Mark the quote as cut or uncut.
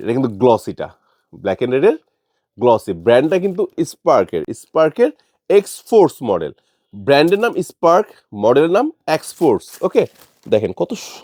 uncut